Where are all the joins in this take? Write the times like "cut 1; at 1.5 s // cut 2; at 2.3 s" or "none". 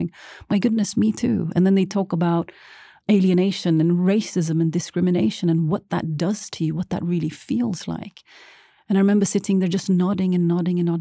cut 1; at 3.1 s